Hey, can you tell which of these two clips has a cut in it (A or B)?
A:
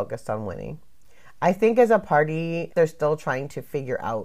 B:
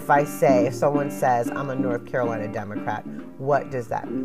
A